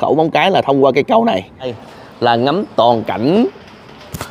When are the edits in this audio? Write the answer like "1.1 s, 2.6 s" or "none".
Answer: 1.8 s